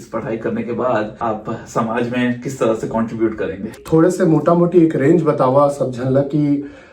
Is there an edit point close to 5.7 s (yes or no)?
no